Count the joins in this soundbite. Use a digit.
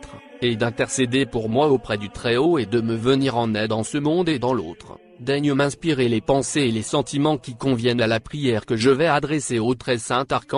0